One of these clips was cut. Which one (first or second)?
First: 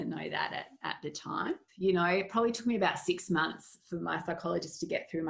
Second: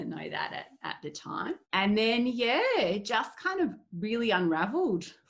first